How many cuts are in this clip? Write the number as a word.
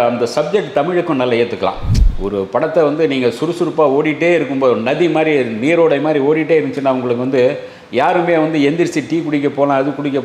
one